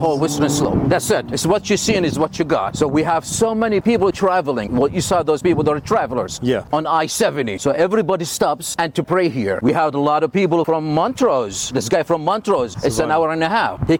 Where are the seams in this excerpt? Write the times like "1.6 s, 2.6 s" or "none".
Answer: none